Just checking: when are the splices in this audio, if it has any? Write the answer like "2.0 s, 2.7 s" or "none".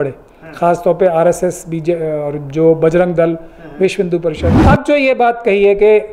4.5 s